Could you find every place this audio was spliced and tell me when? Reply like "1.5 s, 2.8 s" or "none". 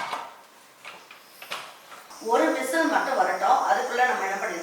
2.1 s